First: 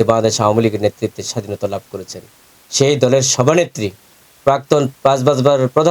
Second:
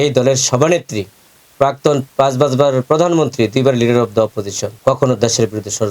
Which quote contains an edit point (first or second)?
second